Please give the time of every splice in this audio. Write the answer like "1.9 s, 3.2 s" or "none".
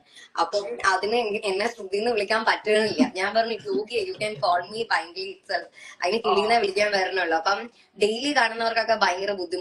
none